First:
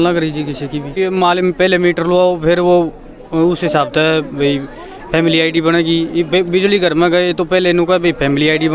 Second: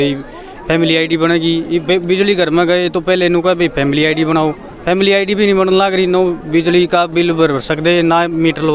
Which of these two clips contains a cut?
first; 1 cut; at 0.9 s

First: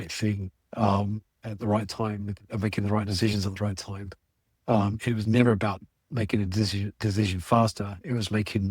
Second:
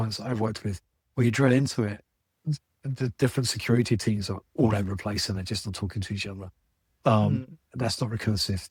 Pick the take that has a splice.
first; 1 cut; at 5.0 s

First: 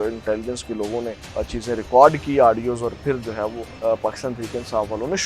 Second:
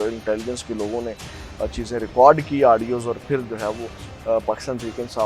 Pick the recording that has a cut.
first; 2 cuts; at 1.2 s, 3.7 s

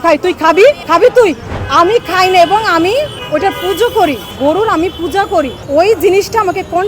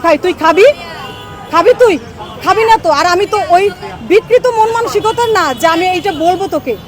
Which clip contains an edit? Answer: first; 5 cuts; at 0.8 s, 1.5 s, 3.2 s, 4.3 s, 5.6 s

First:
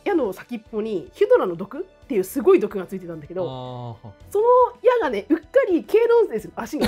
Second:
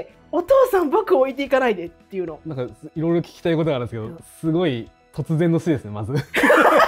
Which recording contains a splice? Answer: second; 1 cut; at 2.4 s

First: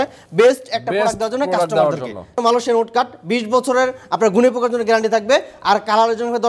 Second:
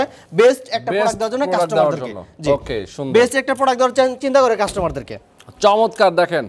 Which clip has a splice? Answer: first; 1 cut; at 2.3 s

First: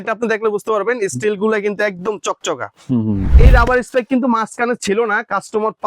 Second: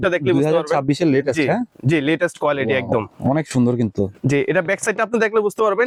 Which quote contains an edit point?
first; 1 cut; at 3.3 s

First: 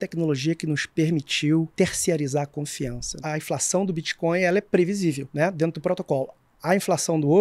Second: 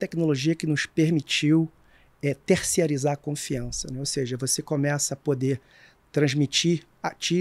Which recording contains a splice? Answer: first; 3 cuts; at 1.7 s, 3.2 s, 5.3 s

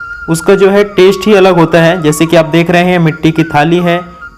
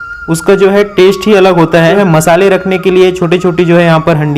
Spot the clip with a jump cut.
second; 1 cut; at 2.0 s

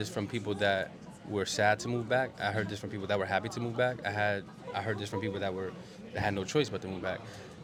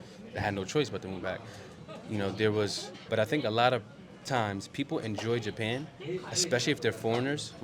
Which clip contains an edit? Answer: second; 1 cut; at 2.9 s

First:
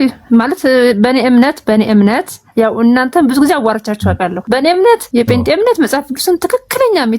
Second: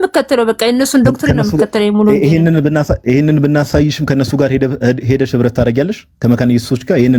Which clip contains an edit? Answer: first; 2 cuts; at 4.4 s, 5.0 s

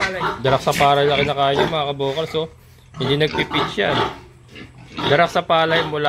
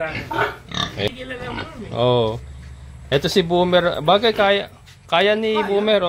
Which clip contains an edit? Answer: second; 1 cut; at 1.1 s

